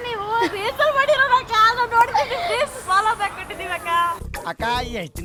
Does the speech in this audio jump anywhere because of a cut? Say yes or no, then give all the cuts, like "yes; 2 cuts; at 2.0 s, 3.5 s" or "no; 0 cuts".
no; 0 cuts